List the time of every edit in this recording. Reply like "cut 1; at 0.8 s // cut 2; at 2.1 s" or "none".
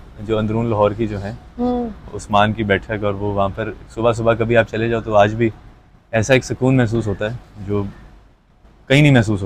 none